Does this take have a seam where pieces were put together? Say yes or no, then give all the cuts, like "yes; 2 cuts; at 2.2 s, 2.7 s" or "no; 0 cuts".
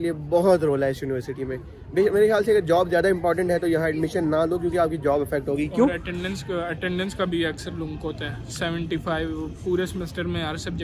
no; 0 cuts